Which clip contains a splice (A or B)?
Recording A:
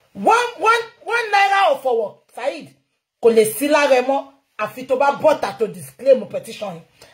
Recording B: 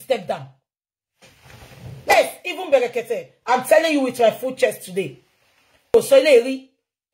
B